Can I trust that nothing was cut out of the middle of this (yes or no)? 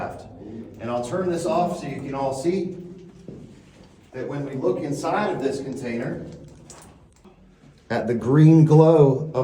no